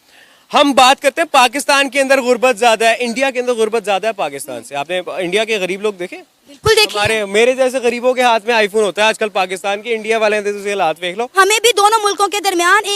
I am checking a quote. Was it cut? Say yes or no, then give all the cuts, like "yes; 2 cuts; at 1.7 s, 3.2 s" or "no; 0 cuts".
yes; 1 cut; at 11.4 s